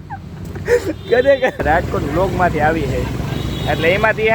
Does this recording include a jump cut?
yes; 1 cut; at 1.6 s

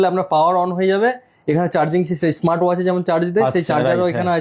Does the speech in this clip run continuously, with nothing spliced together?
yes; 0 cuts

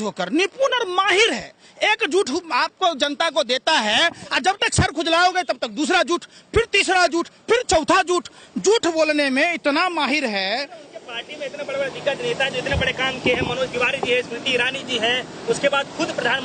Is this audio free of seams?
yes; 0 cuts

